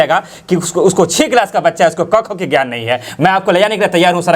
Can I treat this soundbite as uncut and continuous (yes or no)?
yes